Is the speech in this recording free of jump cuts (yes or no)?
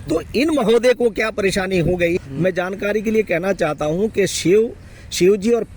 no